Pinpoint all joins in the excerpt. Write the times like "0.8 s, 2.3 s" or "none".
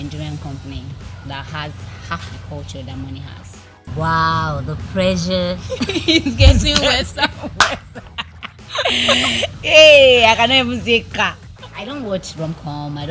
3.9 s, 11.4 s